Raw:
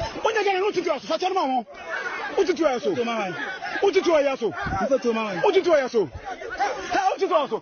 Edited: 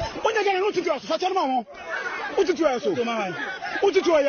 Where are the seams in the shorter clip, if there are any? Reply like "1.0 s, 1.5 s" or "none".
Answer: none